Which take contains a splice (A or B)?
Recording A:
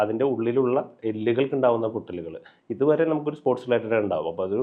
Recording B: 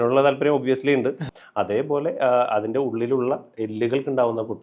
B